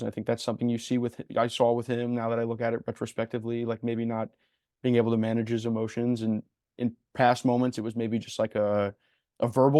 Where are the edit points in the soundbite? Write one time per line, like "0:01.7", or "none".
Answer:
none